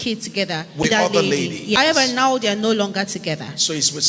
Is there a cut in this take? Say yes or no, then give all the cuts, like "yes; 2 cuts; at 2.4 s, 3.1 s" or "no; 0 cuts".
yes; 2 cuts; at 0.8 s, 1.8 s